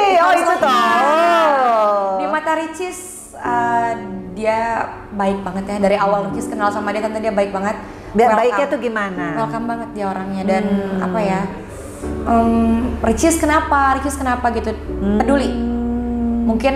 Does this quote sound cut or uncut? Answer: uncut